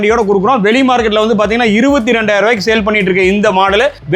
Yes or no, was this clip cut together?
no